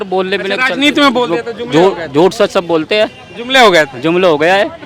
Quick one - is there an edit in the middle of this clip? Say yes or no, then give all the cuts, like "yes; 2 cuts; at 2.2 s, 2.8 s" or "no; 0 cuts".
no; 0 cuts